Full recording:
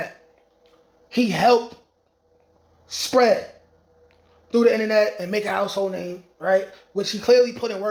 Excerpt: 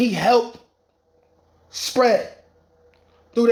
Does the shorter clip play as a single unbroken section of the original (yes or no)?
yes